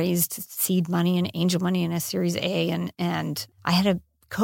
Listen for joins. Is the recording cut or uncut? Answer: cut